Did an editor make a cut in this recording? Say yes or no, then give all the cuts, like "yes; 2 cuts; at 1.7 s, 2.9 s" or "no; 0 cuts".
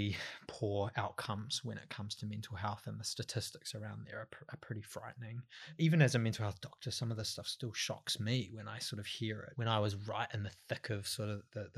yes; 2 cuts; at 5.7 s, 9.5 s